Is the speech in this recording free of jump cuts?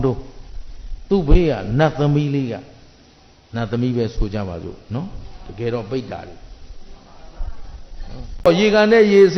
no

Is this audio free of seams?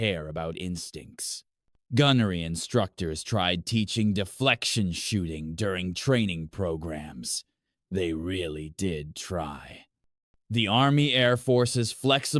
yes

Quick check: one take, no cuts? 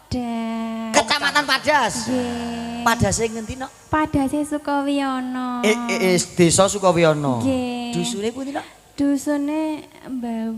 yes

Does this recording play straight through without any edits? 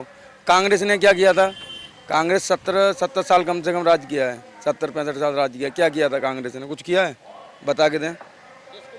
yes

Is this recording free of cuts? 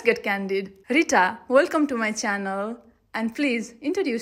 yes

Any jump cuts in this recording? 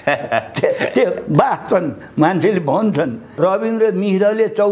yes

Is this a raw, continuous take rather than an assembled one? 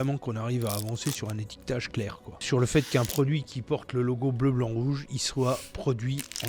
no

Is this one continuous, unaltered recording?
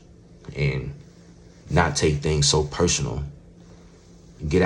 yes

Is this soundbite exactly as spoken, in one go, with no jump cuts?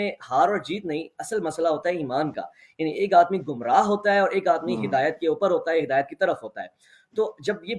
yes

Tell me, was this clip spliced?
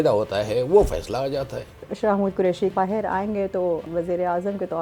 yes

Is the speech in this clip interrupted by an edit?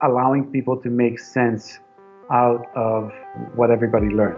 yes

